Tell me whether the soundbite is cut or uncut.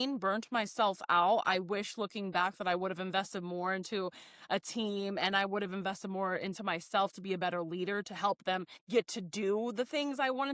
uncut